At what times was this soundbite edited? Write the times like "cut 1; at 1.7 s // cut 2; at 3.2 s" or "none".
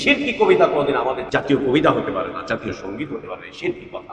cut 1; at 1.2 s